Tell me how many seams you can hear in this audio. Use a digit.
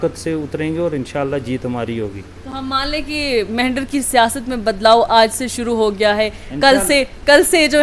0